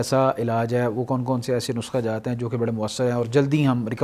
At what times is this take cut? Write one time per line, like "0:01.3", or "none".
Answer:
none